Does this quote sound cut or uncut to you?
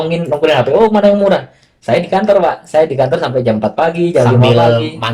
uncut